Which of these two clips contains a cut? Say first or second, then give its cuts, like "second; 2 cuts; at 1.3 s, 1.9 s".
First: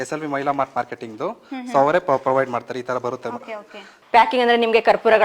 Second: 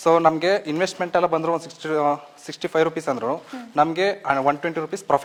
first; 1 cut; at 3.9 s